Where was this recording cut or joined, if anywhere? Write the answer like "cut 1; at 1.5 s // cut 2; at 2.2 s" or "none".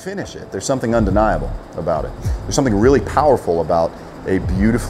none